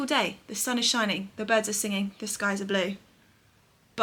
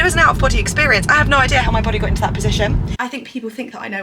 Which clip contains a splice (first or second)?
second